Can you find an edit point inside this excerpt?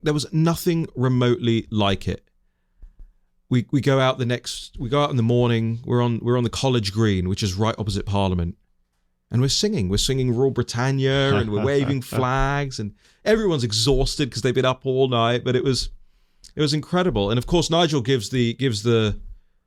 no; 0 cuts

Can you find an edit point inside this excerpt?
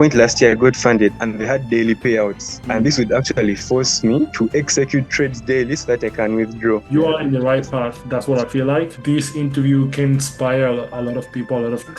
yes; 3 cuts; at 1.1 s, 6.8 s, 8.9 s

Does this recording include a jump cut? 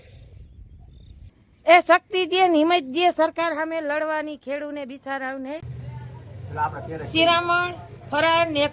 yes; 2 cuts; at 1.3 s, 5.6 s

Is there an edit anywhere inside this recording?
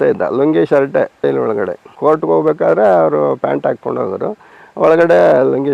no; 0 cuts

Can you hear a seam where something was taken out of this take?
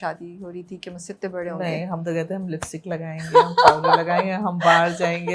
no; 0 cuts

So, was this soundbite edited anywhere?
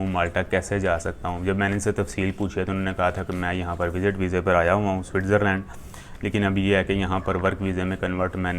no; 0 cuts

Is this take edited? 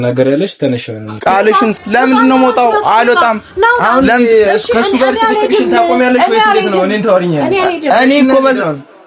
yes; 1 cut; at 1.7 s

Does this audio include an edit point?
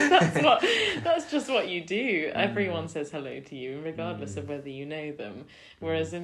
no; 0 cuts

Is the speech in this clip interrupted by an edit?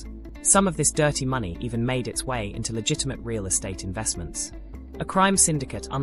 no; 0 cuts

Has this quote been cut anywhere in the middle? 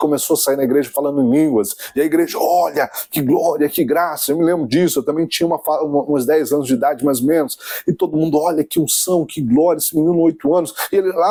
no; 0 cuts

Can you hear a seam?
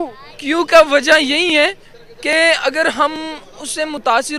no; 0 cuts

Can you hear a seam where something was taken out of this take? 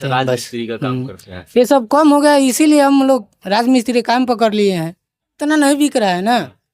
yes; 1 cut; at 5.2 s

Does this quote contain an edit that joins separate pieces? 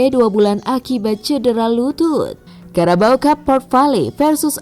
yes; 1 cut; at 2.4 s

